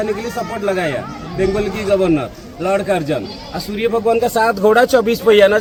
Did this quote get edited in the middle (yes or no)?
no